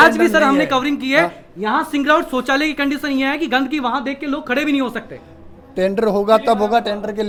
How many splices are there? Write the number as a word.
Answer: zero